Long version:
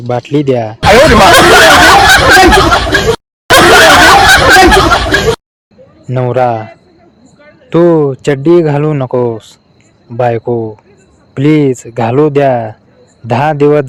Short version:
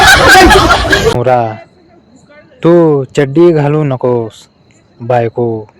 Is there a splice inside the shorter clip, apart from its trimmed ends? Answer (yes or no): yes